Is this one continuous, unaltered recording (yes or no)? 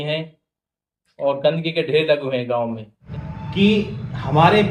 no